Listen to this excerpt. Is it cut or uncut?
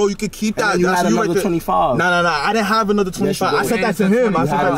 uncut